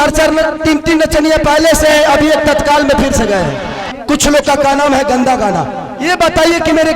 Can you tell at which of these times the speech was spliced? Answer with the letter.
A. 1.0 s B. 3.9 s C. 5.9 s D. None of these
B